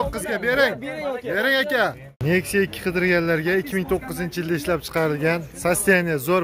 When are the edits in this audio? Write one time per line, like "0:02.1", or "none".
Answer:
0:02.1